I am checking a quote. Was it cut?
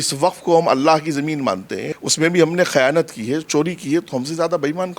yes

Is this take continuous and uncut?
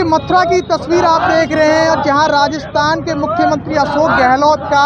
yes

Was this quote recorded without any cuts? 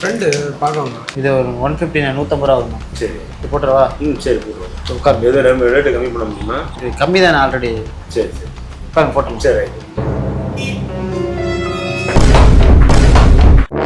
no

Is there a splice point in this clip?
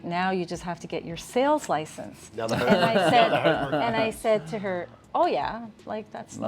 no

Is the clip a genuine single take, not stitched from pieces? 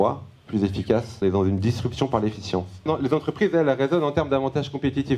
no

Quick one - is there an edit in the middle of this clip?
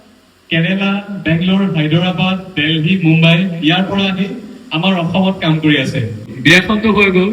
yes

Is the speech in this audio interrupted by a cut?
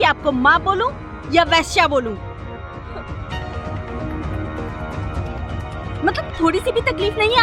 no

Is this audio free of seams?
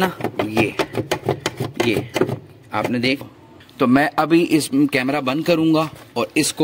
no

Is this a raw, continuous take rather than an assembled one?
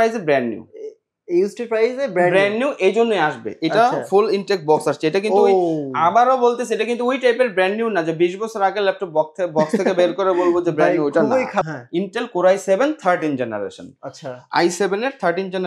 no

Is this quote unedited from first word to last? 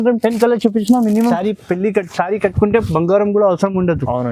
no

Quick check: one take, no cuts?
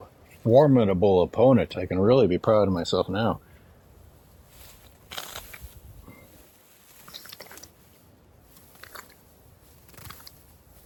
yes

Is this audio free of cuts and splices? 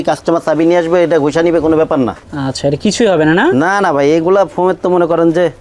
no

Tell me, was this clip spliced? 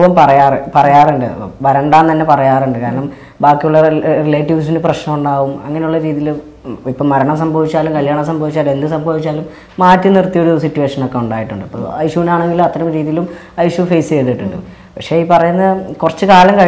no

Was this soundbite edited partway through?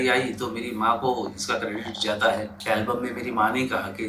yes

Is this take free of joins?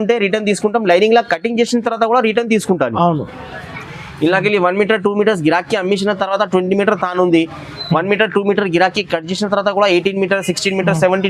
yes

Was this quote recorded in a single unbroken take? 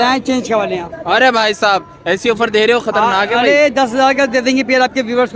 yes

